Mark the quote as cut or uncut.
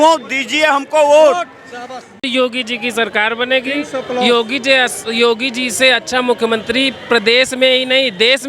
cut